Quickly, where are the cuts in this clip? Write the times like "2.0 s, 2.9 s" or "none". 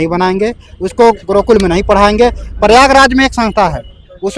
none